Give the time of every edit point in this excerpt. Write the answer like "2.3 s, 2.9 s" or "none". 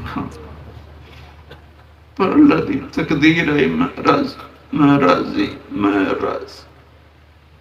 none